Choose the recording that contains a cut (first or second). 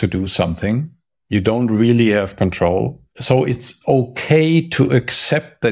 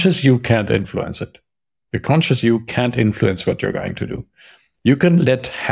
first